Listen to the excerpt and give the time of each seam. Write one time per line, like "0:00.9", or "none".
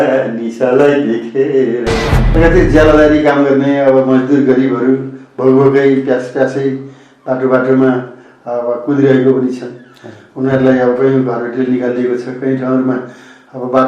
0:02.2